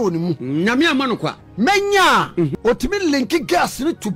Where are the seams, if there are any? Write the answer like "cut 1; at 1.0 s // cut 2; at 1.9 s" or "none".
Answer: cut 1; at 1.4 s // cut 2; at 2.5 s